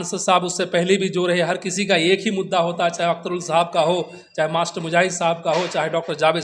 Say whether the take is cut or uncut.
uncut